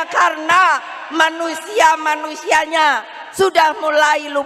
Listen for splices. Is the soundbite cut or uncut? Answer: uncut